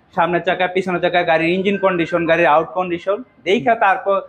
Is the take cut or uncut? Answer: uncut